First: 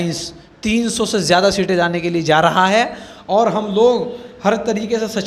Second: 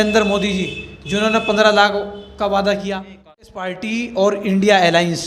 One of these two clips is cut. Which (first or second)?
second